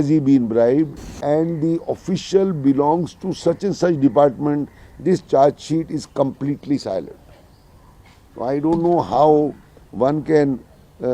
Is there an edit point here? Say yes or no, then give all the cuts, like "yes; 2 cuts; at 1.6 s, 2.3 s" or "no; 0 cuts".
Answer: yes; 1 cut; at 1.1 s